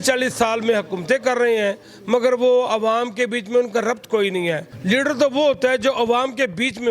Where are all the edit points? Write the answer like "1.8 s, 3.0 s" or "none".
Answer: 4.7 s